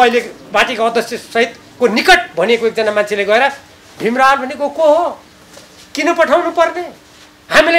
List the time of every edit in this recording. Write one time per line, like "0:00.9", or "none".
none